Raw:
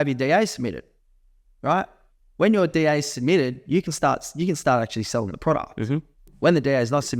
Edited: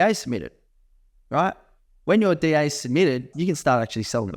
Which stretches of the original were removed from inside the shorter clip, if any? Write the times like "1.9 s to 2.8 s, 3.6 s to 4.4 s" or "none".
3.6 s to 4.3 s

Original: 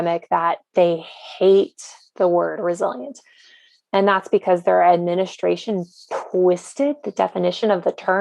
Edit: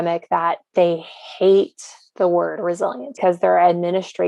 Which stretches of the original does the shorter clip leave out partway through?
3.2 s to 4.4 s

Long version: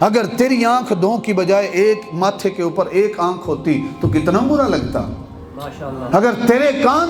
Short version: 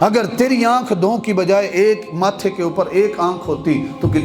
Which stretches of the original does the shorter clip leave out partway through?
none

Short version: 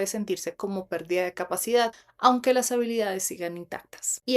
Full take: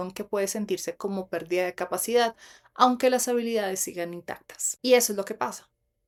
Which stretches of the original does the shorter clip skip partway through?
2.4 s to 2.6 s

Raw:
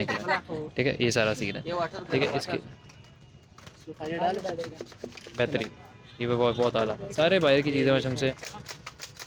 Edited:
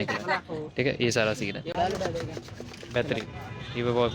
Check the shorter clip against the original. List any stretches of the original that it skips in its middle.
1.7 s to 4.2 s

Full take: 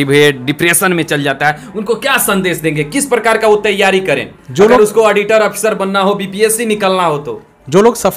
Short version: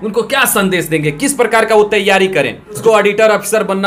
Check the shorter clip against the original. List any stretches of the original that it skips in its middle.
4.5 s to 4.9 s

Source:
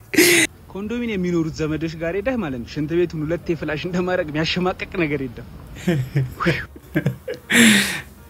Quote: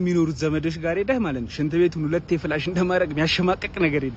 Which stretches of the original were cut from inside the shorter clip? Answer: none

